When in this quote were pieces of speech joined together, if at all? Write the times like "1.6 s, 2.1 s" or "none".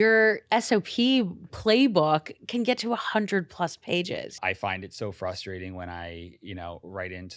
4.4 s